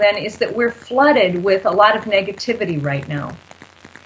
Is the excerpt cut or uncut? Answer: uncut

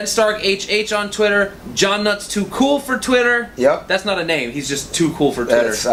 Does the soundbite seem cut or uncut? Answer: uncut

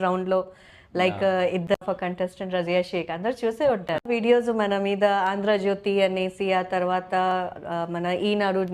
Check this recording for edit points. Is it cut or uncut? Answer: cut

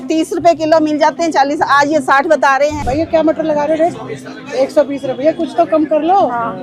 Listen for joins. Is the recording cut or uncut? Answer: cut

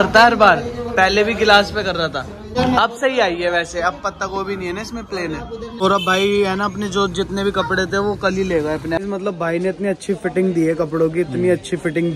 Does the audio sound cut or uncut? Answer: cut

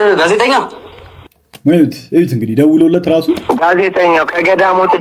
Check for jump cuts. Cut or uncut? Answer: uncut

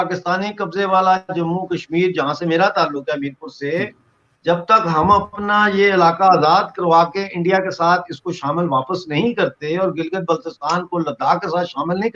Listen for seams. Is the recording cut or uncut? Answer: uncut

